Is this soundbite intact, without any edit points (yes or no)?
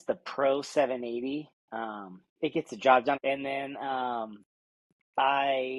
no